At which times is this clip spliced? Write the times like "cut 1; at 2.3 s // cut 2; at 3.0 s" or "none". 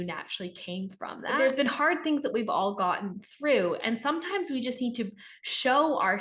cut 1; at 1.4 s